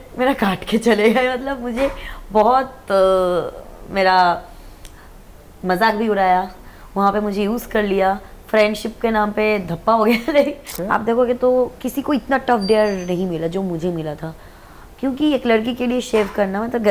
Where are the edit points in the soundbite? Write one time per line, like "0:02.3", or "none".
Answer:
0:10.7